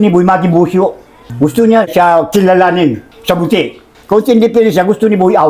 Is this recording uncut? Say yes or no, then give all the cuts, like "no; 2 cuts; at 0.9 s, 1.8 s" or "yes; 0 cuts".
yes; 0 cuts